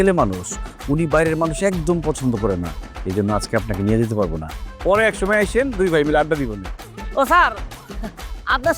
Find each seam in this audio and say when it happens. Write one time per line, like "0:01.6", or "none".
none